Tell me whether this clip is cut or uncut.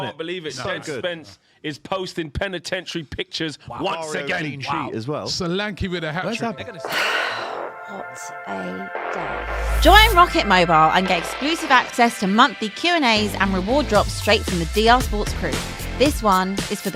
uncut